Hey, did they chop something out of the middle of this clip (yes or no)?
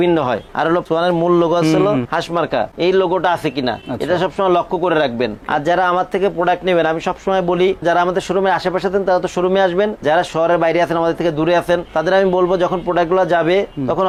no